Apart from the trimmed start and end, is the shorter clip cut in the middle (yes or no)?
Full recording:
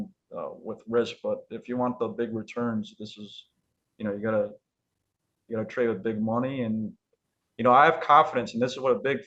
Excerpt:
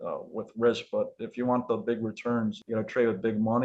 yes